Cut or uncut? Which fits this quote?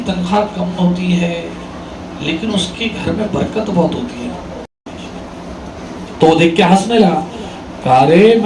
cut